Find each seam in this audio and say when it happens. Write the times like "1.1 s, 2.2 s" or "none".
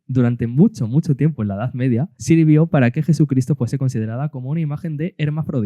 2.1 s